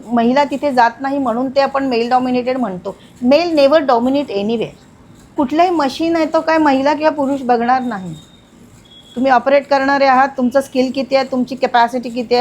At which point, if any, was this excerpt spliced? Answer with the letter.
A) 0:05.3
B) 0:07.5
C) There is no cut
A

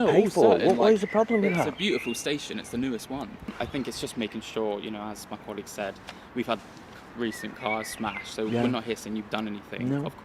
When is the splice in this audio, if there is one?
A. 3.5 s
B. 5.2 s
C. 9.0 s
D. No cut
A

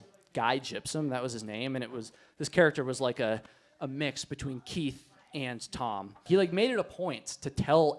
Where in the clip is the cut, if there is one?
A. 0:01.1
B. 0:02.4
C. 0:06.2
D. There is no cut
C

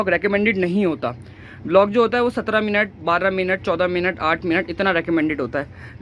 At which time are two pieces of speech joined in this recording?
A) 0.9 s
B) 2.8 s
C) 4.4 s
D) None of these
D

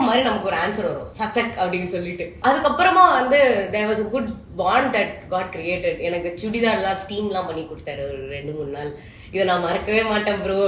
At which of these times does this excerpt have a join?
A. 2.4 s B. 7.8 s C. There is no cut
A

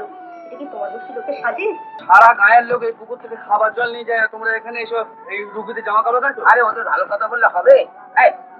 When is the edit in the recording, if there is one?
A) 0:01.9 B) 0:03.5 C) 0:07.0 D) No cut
A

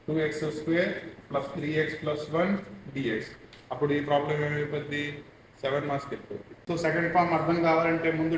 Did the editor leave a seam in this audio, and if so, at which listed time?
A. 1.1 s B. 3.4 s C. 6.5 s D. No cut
C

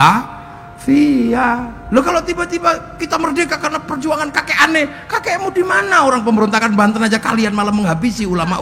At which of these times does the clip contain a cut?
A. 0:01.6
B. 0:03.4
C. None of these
C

